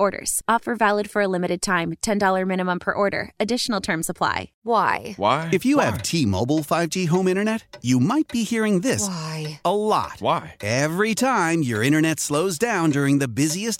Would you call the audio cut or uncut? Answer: cut